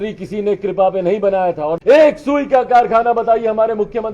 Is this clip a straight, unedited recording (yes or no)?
no